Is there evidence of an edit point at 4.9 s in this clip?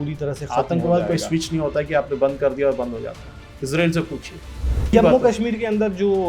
yes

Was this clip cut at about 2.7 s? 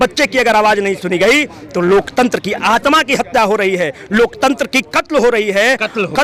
no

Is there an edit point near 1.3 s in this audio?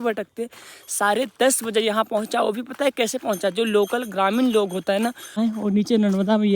no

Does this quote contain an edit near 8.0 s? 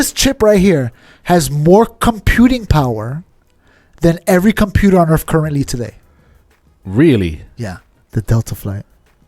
yes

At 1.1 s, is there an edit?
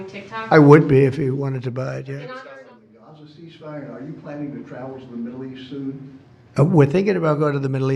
no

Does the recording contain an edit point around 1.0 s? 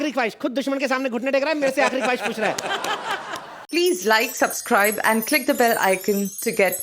no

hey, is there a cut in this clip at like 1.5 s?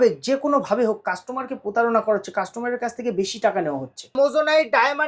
no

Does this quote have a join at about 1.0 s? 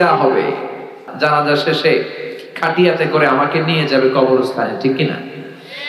yes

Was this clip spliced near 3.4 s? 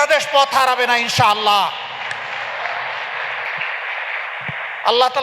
yes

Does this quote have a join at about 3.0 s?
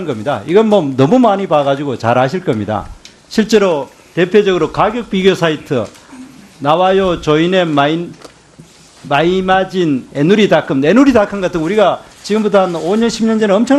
no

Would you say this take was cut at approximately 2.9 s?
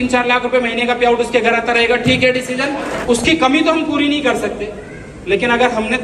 yes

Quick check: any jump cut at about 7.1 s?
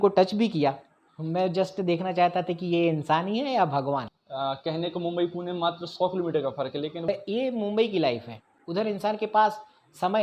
yes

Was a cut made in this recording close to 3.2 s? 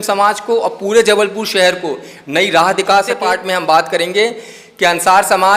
yes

